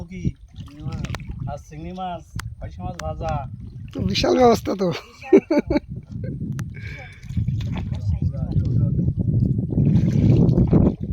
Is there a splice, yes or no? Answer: no